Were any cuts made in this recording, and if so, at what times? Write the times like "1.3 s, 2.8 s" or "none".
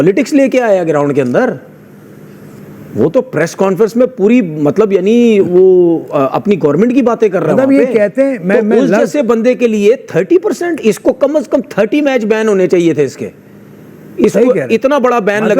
none